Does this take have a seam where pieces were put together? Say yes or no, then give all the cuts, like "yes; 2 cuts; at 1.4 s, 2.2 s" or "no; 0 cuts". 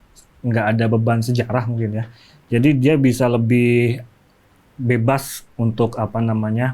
no; 0 cuts